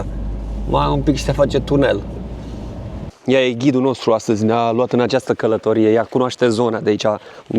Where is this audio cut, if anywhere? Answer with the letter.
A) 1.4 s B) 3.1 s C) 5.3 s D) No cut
B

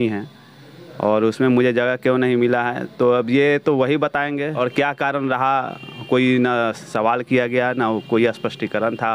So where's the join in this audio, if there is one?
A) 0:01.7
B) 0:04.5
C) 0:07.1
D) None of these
B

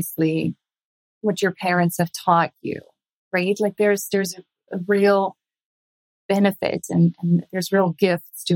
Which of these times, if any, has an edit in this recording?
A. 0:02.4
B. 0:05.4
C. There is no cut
C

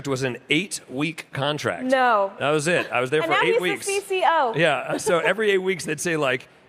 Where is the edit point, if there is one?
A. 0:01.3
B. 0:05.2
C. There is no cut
C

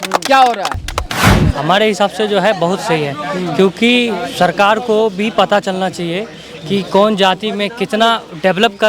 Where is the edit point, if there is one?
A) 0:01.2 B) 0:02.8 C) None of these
A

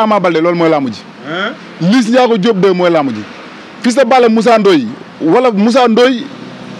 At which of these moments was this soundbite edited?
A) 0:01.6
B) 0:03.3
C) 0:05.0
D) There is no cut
D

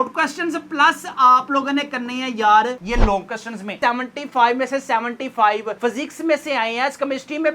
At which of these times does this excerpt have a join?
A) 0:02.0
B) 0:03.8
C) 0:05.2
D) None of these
B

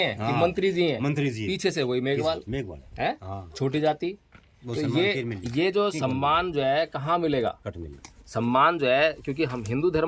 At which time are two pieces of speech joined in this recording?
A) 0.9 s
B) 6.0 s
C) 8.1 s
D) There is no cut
D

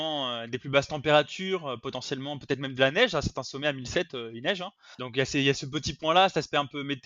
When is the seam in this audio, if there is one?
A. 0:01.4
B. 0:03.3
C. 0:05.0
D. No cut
C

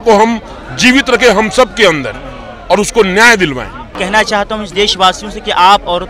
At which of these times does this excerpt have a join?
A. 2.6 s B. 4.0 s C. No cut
B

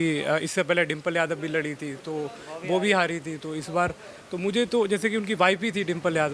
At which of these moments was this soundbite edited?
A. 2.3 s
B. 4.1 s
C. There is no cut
C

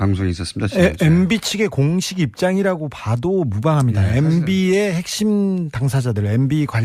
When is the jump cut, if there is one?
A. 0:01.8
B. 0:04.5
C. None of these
A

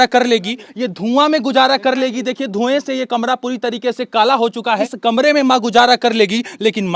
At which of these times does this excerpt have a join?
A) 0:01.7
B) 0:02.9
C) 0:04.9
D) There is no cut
C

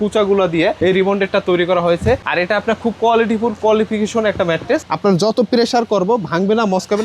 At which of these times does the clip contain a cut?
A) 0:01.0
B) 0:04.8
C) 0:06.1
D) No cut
B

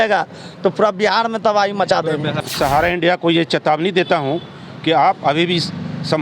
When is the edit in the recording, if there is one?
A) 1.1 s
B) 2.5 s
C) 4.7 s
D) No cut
B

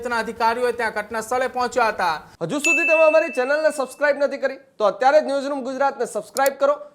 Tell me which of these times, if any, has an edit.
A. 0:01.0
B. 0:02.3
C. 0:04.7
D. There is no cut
B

